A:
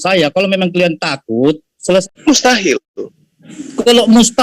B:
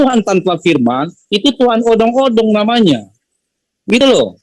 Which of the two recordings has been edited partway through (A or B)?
A